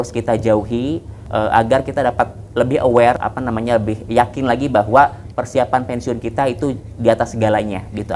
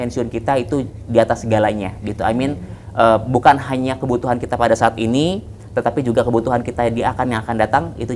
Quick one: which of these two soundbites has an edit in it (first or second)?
first